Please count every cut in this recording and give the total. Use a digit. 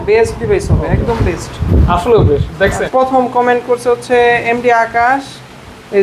1